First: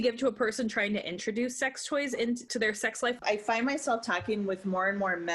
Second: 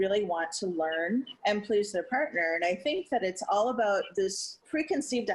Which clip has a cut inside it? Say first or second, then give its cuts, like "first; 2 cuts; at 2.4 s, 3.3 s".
first; 1 cut; at 3.2 s